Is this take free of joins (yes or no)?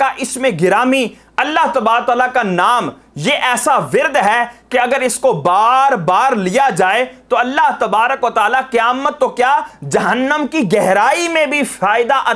yes